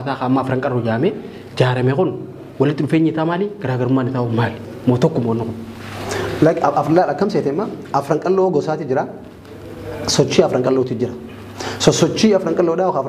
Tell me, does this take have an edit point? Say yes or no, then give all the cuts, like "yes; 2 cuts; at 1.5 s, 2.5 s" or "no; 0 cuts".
no; 0 cuts